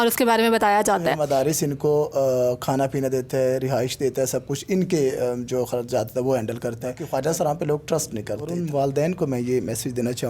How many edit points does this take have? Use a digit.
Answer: 3